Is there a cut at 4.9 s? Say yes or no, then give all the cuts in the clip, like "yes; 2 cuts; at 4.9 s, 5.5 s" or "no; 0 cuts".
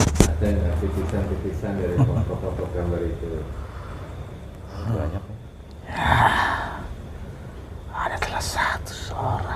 yes; 1 cut; at 4.9 s